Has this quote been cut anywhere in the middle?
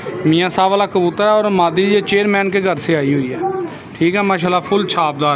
no; 0 cuts

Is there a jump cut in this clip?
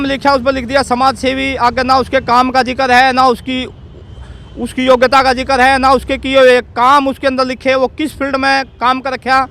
no; 0 cuts

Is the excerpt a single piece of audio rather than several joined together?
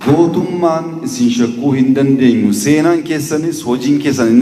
yes; 0 cuts

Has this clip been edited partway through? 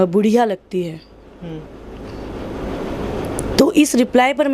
no; 0 cuts

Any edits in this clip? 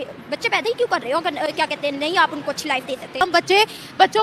no; 0 cuts

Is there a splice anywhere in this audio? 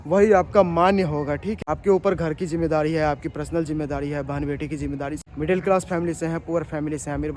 yes; 2 cuts; at 1.5 s, 5.2 s

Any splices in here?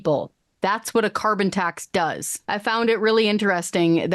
yes; 1 cut; at 2.3 s

